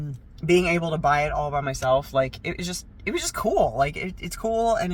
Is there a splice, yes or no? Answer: no